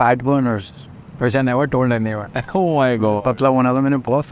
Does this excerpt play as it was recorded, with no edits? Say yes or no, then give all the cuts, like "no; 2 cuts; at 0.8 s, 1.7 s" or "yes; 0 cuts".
yes; 0 cuts